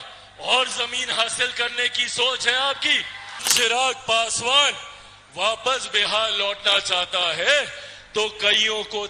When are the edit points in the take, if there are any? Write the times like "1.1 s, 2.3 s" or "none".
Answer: 3.5 s